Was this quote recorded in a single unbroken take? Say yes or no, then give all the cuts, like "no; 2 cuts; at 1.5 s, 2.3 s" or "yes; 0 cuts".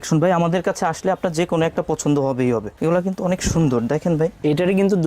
no; 1 cut; at 2.7 s